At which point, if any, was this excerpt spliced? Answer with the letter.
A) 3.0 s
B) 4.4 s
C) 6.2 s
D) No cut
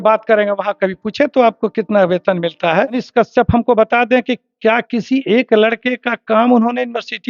A